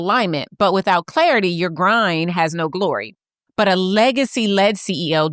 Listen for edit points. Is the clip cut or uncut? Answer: cut